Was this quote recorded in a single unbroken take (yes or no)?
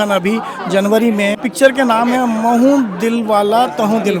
no